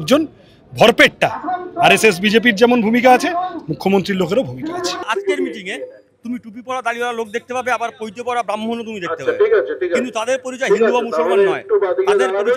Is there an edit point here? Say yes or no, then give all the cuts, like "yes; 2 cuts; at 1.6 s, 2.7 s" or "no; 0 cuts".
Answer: yes; 1 cut; at 5.0 s